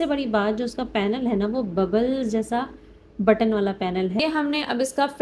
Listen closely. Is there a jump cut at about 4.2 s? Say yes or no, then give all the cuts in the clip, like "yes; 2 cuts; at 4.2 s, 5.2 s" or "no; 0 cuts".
yes; 1 cut; at 4.2 s